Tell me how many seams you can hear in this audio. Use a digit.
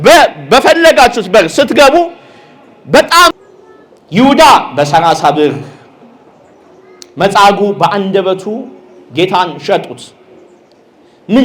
1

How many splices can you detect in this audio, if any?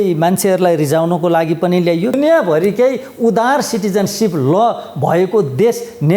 1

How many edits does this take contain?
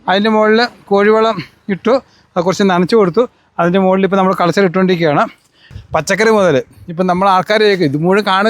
1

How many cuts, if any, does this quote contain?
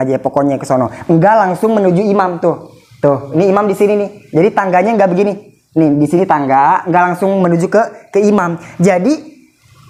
0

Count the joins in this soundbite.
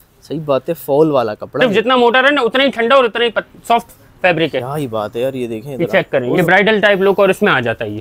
2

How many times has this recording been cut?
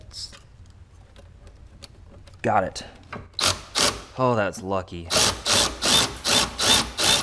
0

